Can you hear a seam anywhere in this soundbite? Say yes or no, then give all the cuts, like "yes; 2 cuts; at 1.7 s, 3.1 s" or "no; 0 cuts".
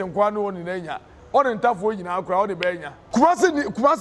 yes; 1 cut; at 2.9 s